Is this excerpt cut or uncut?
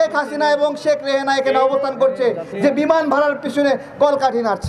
uncut